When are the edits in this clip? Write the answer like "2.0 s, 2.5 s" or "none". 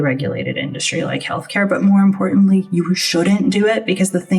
none